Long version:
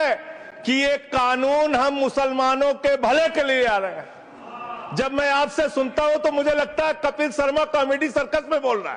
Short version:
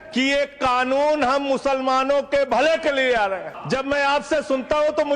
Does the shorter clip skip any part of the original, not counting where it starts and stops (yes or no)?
yes